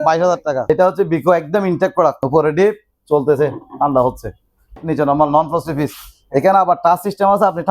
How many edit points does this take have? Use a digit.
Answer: 3